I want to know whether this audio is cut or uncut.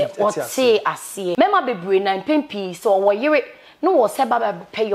cut